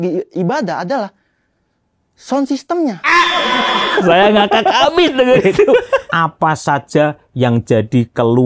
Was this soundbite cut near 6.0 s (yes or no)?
yes